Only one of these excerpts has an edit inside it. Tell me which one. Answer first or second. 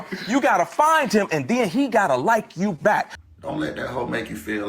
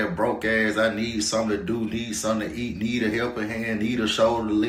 first